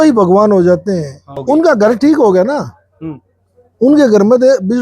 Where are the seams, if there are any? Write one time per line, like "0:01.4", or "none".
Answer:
0:01.4